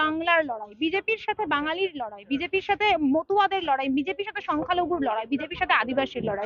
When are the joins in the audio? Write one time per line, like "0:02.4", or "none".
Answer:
none